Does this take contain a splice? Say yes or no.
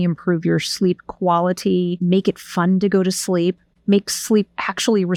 no